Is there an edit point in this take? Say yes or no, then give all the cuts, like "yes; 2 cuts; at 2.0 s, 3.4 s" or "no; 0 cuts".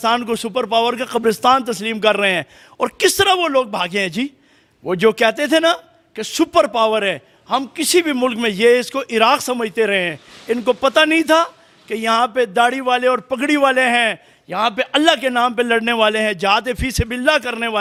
no; 0 cuts